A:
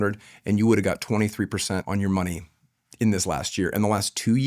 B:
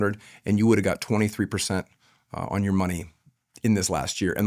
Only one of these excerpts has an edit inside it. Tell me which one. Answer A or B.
A